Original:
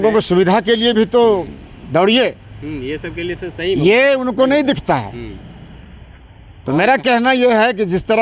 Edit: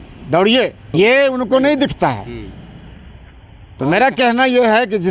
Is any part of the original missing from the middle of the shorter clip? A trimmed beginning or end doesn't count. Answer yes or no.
yes